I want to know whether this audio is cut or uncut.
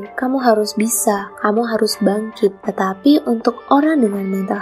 cut